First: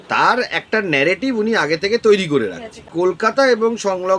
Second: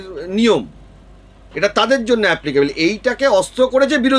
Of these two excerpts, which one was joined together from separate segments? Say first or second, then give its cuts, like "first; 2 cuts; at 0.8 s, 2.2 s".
first; 1 cut; at 2.9 s